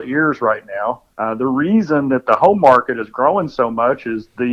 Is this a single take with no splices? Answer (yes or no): no